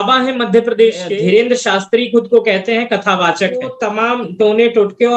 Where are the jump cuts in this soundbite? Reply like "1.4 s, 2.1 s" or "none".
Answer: 1.1 s, 3.8 s